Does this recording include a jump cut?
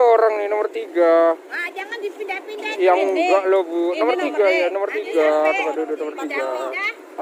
no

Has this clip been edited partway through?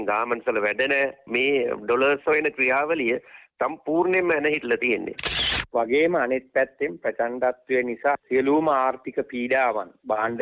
yes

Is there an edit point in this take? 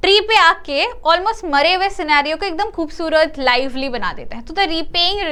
no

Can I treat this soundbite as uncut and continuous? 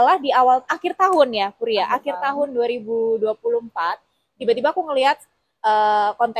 yes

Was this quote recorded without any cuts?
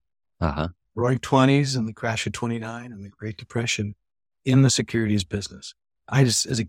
yes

